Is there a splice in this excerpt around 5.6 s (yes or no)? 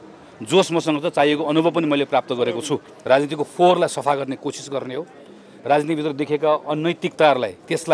no